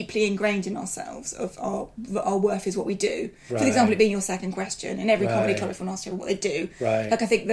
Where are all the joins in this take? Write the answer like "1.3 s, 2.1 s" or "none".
none